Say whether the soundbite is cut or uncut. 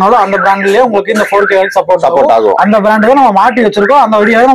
uncut